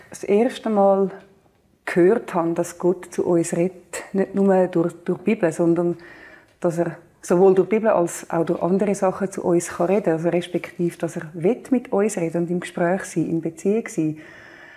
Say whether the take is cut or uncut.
uncut